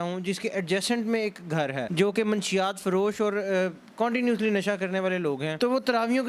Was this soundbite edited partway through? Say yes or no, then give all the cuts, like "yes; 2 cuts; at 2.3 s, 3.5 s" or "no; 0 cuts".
yes; 2 cuts; at 1.8 s, 5.5 s